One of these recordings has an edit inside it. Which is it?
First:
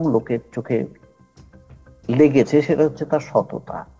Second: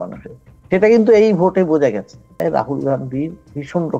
second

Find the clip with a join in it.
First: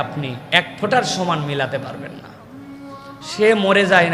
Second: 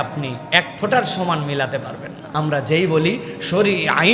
second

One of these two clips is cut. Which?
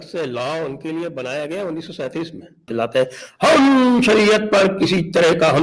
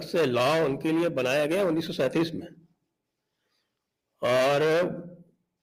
first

